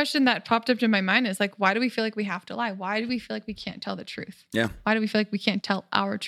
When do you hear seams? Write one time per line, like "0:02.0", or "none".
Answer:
none